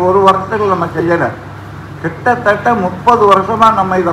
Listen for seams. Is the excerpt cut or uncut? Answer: uncut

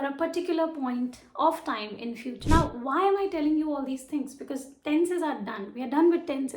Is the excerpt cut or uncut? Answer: cut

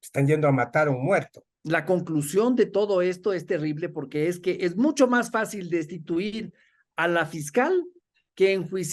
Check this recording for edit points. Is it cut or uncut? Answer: cut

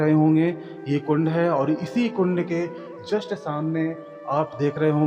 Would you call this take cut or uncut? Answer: uncut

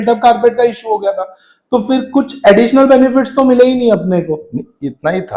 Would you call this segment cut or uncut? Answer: uncut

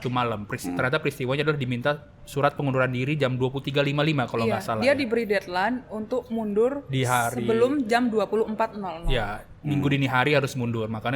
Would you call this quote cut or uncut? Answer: uncut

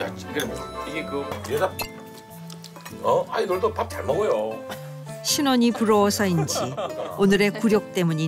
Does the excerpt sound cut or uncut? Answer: cut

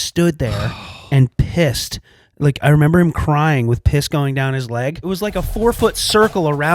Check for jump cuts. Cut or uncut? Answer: cut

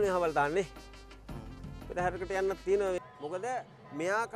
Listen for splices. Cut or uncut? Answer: cut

